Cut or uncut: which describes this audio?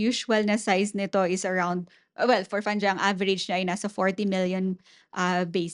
uncut